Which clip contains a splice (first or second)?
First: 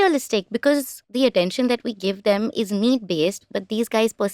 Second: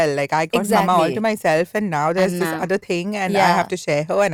first